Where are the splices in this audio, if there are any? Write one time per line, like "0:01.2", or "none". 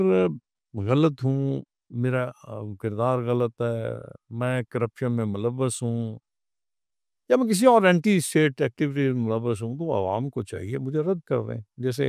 none